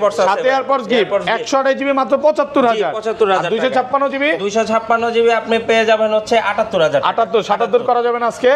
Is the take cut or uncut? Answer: uncut